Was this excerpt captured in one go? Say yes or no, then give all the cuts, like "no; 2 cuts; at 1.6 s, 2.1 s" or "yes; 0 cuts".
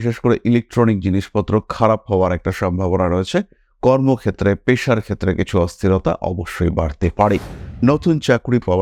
yes; 0 cuts